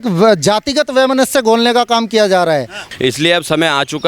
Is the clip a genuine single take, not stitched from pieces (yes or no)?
no